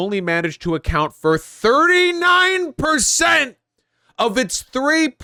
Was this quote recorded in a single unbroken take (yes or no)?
yes